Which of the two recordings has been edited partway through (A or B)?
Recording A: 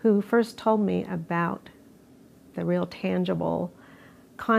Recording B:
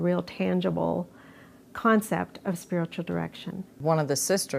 B